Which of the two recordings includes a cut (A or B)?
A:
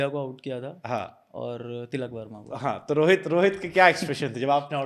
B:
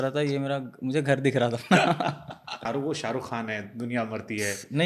B